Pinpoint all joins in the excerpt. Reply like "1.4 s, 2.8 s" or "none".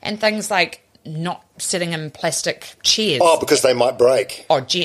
0.9 s, 2.7 s